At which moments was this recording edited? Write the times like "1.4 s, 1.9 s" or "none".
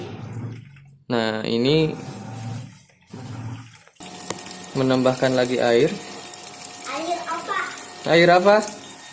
3.1 s